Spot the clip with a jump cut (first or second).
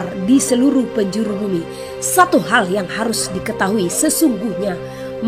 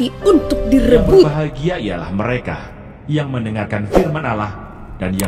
second